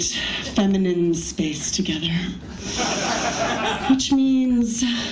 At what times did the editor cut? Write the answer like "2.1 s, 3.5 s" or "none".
3.8 s